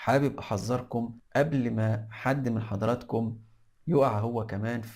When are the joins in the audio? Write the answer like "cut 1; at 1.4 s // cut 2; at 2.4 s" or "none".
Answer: cut 1; at 1.2 s